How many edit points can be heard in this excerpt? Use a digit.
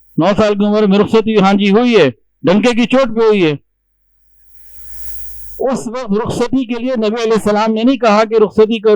0